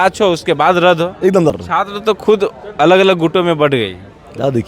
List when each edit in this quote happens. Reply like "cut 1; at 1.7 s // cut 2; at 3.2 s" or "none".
cut 1; at 1.5 s